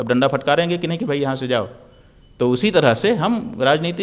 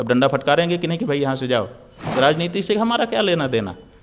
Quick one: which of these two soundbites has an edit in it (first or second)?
second